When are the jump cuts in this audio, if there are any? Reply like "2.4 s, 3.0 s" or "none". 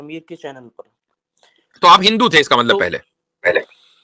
none